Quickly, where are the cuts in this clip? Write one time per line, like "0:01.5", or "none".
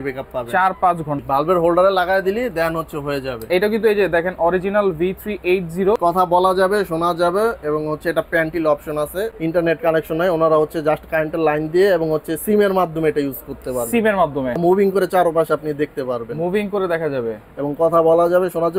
0:01.2
0:06.0
0:09.3
0:14.6